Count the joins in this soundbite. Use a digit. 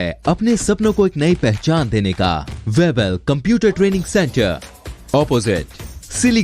1